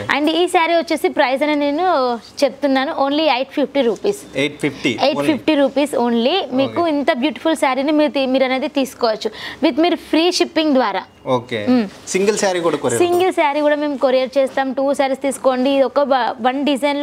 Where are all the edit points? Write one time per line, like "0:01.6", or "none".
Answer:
none